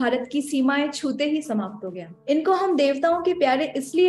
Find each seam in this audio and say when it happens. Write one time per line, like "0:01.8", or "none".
0:02.1

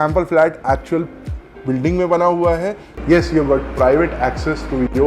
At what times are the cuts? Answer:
0:02.9

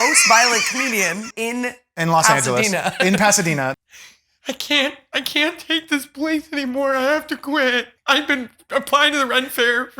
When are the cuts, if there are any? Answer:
0:01.3
0:03.7
0:07.9

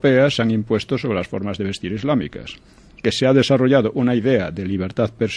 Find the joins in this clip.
0:01.1

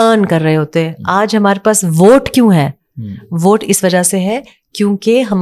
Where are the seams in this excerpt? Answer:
none

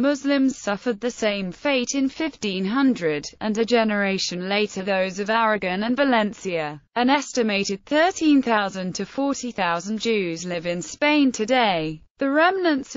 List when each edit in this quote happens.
0:01.5

